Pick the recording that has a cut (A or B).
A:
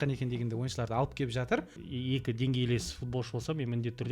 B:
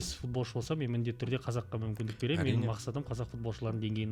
A